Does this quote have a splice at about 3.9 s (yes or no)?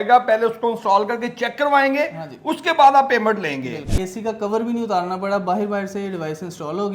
yes